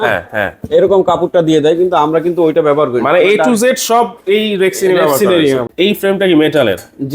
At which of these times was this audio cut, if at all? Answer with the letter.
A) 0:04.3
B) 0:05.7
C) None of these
B